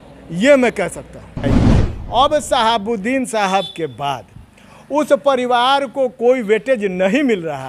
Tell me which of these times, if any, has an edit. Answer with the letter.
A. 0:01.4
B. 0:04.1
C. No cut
A